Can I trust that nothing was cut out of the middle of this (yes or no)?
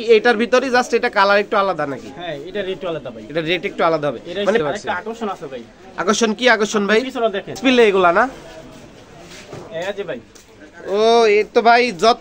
no